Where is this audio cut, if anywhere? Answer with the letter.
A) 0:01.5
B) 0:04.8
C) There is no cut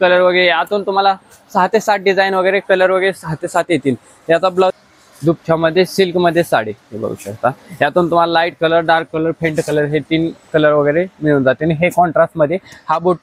B